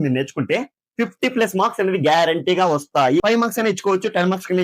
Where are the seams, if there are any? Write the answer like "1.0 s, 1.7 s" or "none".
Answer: 3.2 s